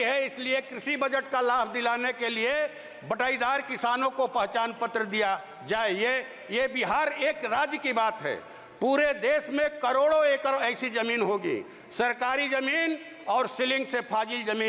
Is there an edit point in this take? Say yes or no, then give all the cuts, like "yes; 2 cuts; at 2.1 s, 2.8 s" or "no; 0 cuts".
no; 0 cuts